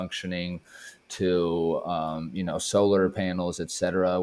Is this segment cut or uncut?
uncut